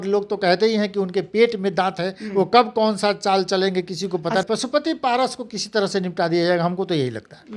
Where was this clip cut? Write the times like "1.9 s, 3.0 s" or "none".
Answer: 4.4 s